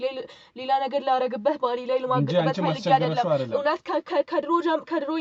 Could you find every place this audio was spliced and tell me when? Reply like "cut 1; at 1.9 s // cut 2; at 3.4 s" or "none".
none